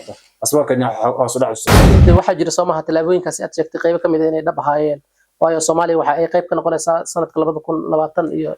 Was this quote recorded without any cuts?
no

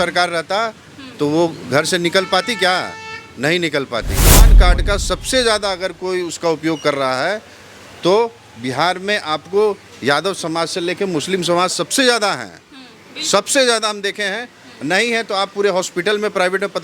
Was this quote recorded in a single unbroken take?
no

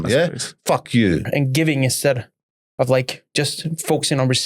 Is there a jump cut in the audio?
yes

